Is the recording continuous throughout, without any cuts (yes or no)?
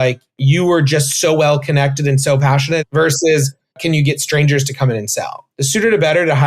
no